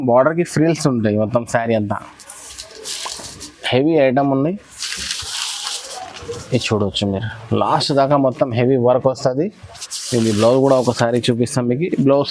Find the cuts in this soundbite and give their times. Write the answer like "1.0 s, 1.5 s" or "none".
none